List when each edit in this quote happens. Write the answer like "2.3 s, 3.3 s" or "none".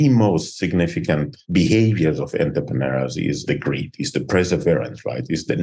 3.4 s